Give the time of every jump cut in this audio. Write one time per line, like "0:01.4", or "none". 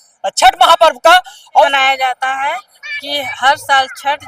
0:01.7